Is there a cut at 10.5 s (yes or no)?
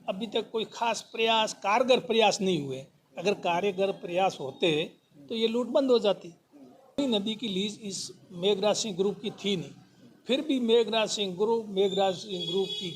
no